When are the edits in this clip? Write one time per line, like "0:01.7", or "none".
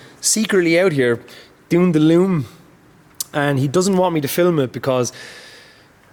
none